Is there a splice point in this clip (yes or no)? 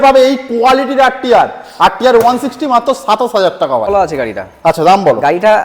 yes